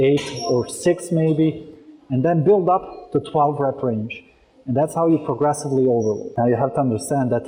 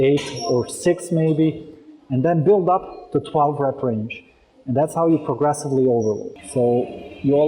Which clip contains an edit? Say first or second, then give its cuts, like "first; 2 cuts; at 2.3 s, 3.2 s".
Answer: second; 1 cut; at 6.3 s